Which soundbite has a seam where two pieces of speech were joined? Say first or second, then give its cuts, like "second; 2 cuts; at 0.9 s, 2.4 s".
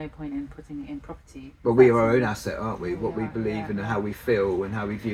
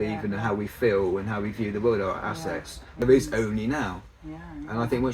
second; 1 cut; at 2.9 s